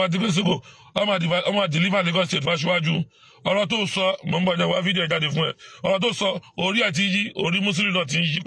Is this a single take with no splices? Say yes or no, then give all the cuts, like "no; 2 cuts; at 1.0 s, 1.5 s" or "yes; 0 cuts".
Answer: yes; 0 cuts